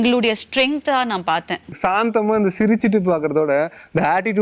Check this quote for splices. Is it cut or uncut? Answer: cut